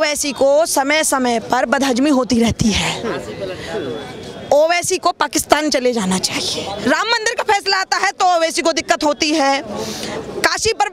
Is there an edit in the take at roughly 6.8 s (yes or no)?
yes